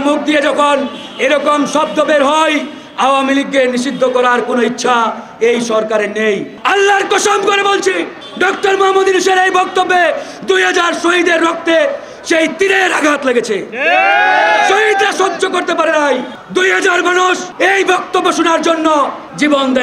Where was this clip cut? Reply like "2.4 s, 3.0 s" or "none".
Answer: none